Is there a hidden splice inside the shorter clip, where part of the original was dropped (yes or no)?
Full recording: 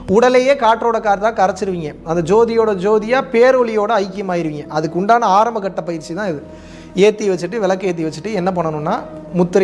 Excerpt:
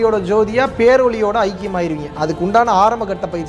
no